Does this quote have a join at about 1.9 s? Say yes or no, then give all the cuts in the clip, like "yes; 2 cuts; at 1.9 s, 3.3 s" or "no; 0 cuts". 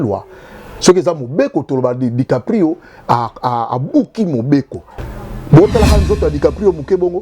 no; 1 cut; at 4.8 s